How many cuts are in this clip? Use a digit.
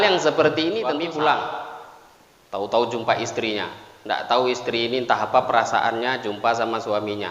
1